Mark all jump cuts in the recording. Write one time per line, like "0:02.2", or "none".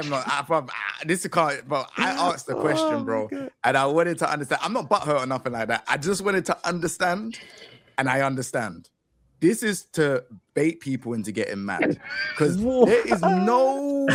none

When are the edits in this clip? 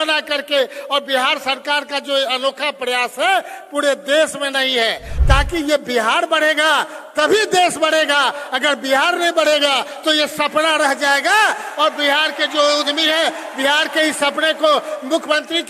0:05.1

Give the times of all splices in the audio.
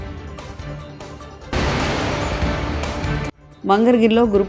0:01.5
0:03.4

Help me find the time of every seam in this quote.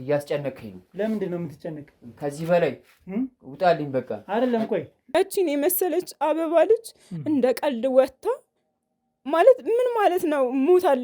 0:05.1

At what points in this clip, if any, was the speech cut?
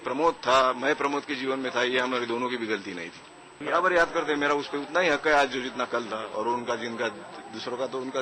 0:03.6

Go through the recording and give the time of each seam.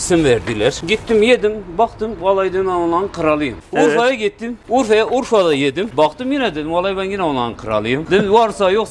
0:00.8
0:03.6
0:04.5
0:05.9
0:08.0

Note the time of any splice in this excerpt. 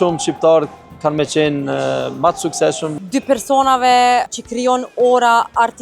0:02.9
0:04.3

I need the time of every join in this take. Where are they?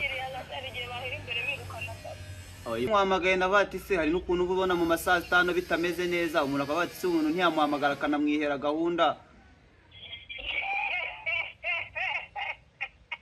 0:02.9

